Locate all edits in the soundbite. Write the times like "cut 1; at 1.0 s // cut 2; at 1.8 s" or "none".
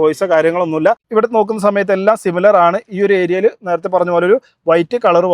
cut 1; at 1.0 s

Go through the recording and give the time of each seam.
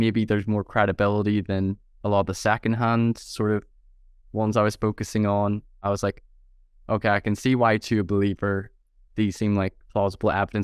cut 1; at 5.8 s

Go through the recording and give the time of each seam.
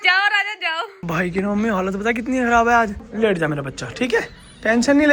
cut 1; at 1.0 s // cut 2; at 3.0 s

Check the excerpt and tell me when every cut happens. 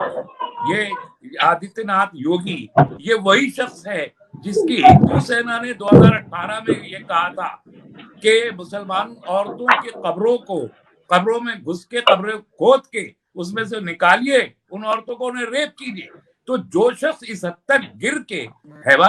none

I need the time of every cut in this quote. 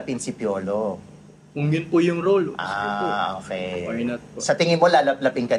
none

